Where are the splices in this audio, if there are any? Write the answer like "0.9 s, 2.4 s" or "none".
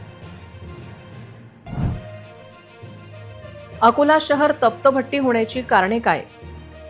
none